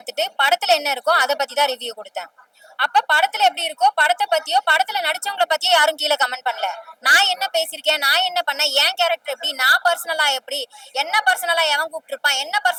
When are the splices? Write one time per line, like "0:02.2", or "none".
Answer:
none

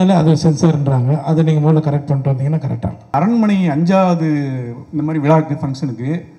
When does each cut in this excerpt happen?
0:03.1

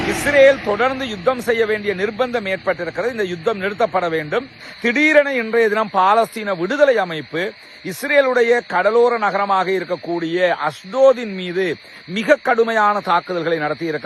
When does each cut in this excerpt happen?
0:04.6

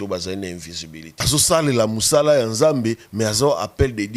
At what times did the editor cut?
0:01.3

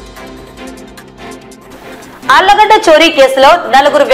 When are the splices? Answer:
none

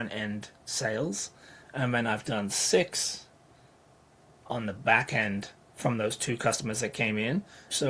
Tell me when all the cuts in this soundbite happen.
none

